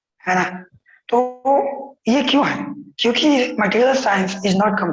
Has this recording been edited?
no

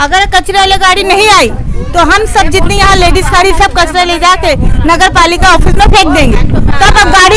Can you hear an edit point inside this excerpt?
no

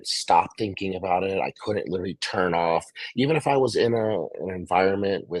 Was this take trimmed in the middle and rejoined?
no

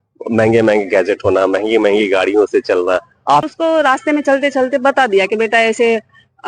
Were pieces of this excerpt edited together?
yes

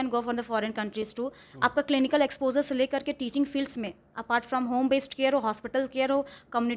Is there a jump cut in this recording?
no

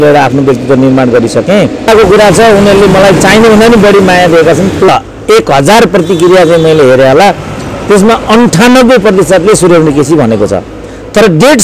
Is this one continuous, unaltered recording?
no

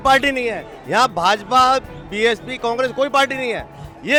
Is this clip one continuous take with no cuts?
yes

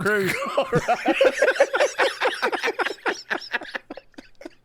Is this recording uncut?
yes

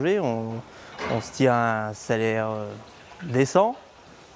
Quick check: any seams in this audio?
no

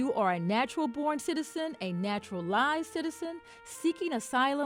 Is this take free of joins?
yes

